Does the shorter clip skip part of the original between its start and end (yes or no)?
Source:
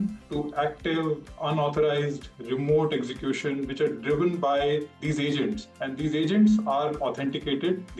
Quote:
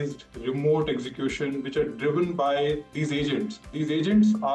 yes